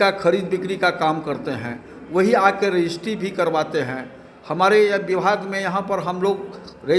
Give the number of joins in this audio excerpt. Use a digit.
0